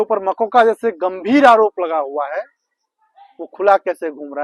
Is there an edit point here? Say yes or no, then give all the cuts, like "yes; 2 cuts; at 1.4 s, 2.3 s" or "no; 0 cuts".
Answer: no; 0 cuts